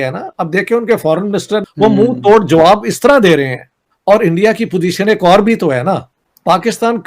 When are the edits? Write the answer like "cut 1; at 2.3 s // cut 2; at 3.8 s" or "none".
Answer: cut 1; at 1.6 s // cut 2; at 3.8 s